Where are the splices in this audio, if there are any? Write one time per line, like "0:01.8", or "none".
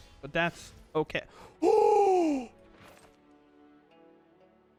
none